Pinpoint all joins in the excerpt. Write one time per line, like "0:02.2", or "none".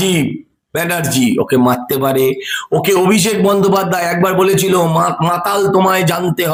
none

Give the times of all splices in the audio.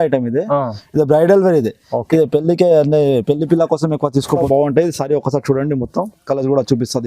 0:04.4

